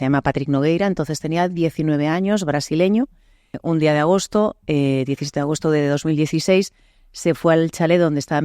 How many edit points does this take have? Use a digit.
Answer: 1